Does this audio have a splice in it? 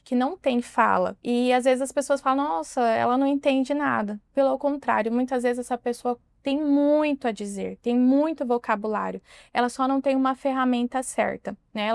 yes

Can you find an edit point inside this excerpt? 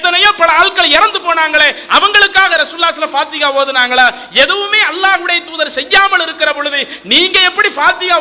no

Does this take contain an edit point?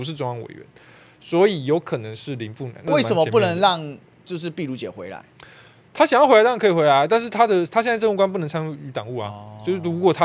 yes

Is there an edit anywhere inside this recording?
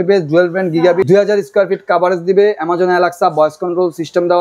yes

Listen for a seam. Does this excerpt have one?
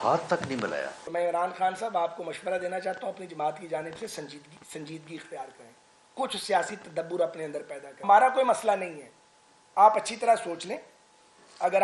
yes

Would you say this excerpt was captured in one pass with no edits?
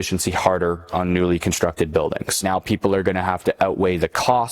no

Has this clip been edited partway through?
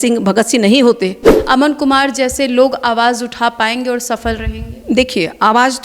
yes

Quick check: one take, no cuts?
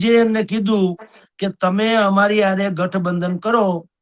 yes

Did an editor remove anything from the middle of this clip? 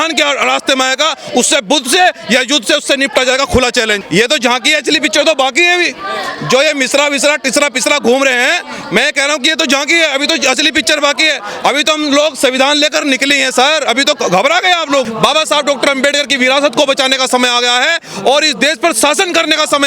yes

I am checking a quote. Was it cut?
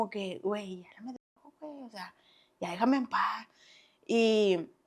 no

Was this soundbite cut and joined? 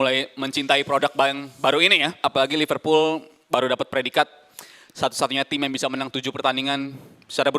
yes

